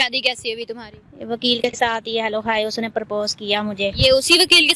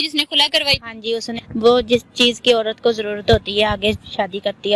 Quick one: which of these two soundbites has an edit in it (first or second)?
second